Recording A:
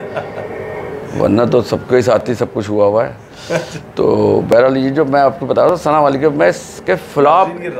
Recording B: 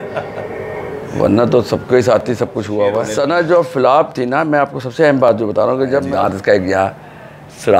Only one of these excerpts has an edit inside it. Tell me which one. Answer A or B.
B